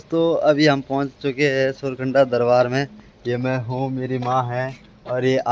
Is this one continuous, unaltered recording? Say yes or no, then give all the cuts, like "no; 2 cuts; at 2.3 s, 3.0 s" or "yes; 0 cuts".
yes; 0 cuts